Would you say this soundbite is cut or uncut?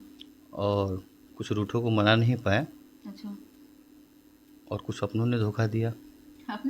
uncut